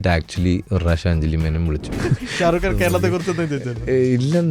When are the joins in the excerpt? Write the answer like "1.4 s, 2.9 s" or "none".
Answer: 1.9 s